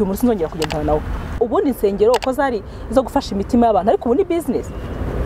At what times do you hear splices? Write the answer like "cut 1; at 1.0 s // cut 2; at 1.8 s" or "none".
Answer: cut 1; at 1.3 s